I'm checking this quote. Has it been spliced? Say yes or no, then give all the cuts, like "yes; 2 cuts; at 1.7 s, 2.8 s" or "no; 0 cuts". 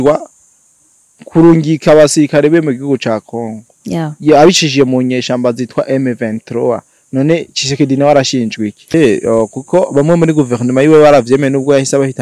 yes; 1 cut; at 8.9 s